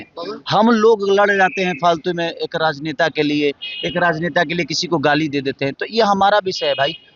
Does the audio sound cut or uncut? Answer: uncut